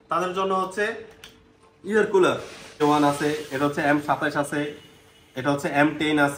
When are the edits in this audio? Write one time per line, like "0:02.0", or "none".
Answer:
0:02.8